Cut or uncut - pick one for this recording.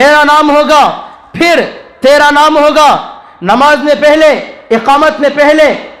uncut